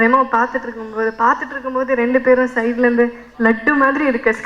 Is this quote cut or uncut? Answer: uncut